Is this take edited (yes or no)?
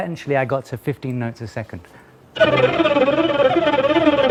no